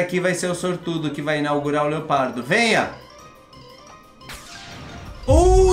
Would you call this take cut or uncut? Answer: uncut